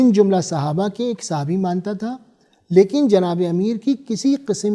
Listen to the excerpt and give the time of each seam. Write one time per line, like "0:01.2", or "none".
none